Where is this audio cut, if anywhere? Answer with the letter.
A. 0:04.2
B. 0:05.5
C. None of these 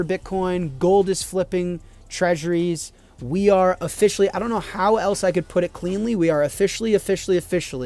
C